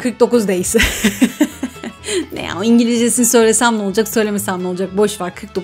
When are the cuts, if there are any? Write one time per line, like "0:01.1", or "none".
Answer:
none